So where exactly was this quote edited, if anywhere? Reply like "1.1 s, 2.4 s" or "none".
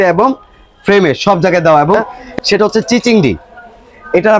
2.2 s